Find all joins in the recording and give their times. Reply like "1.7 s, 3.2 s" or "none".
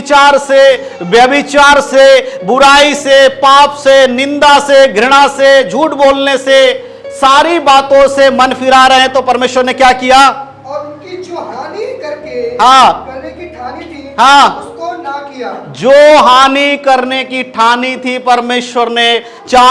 none